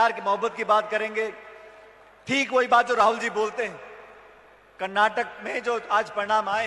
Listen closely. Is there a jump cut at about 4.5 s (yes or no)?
no